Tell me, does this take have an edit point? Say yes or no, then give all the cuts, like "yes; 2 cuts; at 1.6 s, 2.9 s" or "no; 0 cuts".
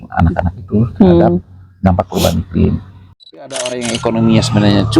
yes; 1 cut; at 3.2 s